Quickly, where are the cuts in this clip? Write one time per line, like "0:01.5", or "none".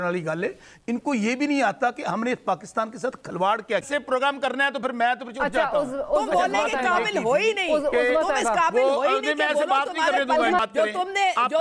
0:03.9
0:10.6